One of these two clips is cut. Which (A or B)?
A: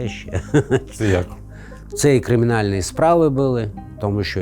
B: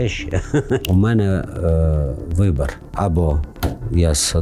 B